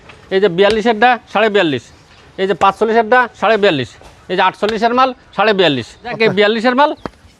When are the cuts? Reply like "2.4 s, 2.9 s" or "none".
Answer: 6.2 s